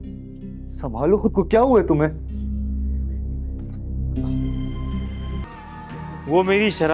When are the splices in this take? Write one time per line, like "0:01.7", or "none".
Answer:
0:05.5